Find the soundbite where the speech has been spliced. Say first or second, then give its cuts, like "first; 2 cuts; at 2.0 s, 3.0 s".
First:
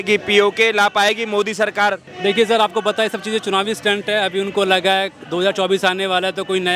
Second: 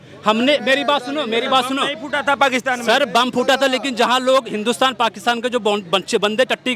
first; 1 cut; at 2.1 s